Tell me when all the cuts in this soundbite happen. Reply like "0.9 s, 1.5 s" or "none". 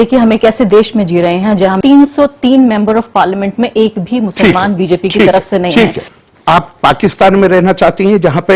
1.8 s, 6.1 s

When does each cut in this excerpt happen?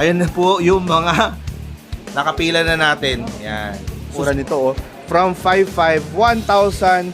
4.2 s

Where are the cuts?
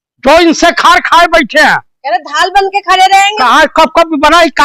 1.9 s, 3.4 s

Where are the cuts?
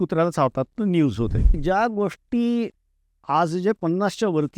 1.6 s

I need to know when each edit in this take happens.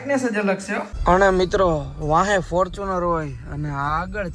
0.9 s

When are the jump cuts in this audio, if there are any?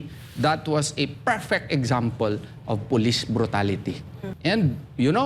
4.2 s

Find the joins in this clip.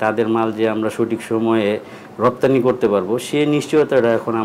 none

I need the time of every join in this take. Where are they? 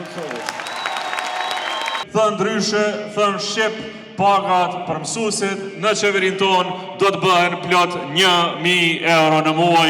2.0 s

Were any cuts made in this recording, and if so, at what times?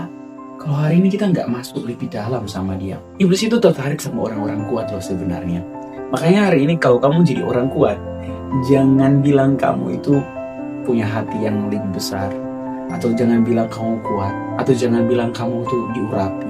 3.4 s

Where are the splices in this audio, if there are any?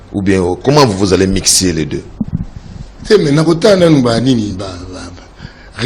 none

